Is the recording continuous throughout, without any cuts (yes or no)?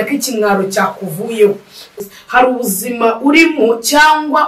no